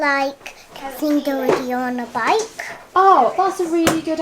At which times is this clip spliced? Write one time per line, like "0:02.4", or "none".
none